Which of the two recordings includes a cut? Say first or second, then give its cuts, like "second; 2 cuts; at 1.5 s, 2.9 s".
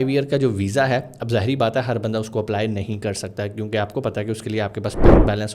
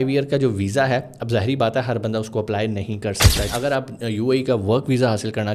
second; 1 cut; at 3.5 s